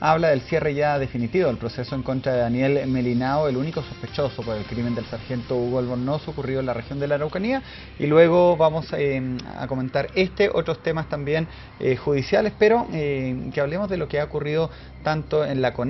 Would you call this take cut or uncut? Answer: cut